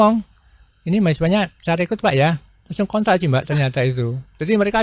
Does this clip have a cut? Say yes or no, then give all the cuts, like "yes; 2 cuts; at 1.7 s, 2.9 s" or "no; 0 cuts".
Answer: no; 0 cuts